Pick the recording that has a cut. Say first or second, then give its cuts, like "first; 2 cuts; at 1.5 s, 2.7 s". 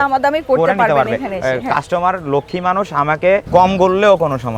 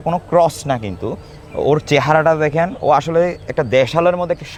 first; 1 cut; at 3.5 s